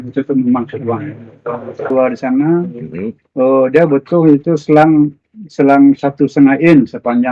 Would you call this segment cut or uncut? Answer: cut